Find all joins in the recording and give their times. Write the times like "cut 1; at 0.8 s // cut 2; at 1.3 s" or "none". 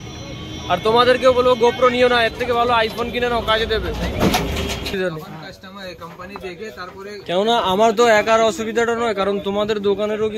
cut 1; at 4.9 s